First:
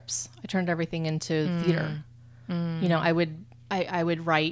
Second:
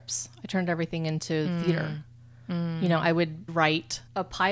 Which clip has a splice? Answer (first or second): second